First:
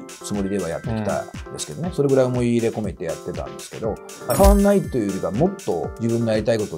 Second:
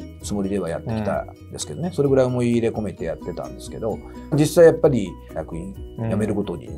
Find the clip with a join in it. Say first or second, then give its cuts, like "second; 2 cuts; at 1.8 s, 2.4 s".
first; 2 cuts; at 4.3 s, 5.9 s